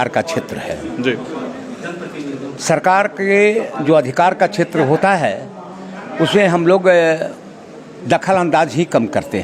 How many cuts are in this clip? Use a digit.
0